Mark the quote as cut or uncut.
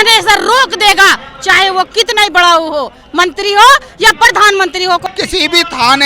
cut